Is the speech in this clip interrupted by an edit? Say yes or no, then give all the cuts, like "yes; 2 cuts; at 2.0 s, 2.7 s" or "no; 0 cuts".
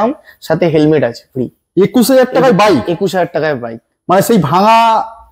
no; 0 cuts